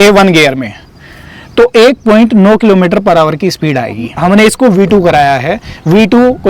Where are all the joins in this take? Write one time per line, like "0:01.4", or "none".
0:04.1

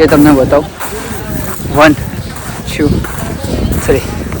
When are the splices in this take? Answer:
none

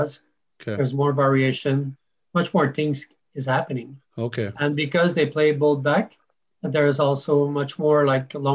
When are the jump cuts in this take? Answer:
none

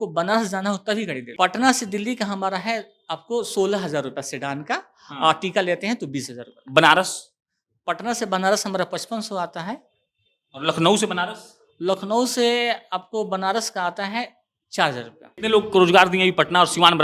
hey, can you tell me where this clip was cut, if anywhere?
0:01.2
0:15.2

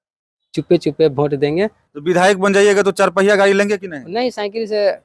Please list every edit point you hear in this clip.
0:01.8

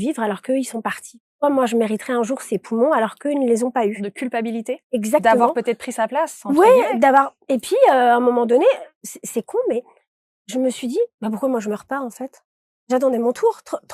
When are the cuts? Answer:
0:04.0

